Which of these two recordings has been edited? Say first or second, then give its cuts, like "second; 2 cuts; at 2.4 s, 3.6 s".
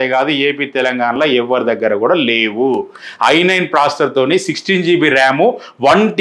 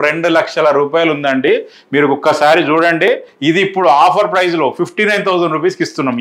second; 1 cut; at 3.3 s